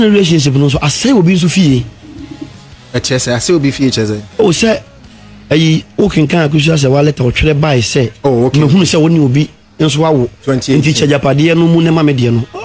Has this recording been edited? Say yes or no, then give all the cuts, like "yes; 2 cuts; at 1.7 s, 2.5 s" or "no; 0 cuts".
no; 0 cuts